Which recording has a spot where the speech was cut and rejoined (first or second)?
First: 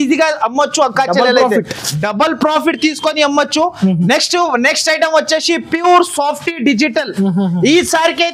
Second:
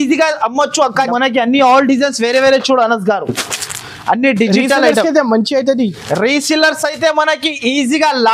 second